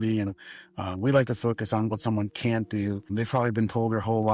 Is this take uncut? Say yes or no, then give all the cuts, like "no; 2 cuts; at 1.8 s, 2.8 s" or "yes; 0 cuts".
no; 1 cut; at 3.0 s